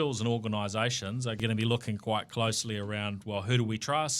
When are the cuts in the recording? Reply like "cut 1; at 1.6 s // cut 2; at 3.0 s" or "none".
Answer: cut 1; at 1.4 s

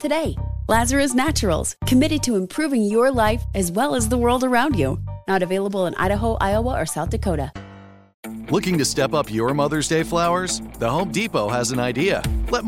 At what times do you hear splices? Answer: cut 1; at 8.2 s

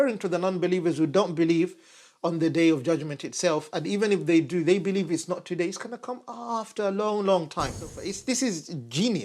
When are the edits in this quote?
cut 1; at 8.1 s

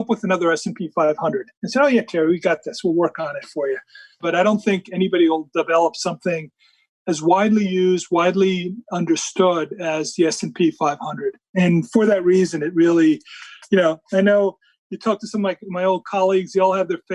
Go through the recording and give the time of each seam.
cut 1; at 4.2 s

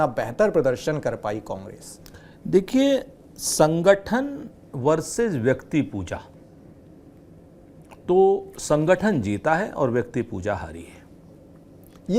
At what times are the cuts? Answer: none

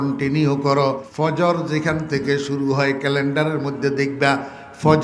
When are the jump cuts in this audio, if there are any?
cut 1; at 1.0 s

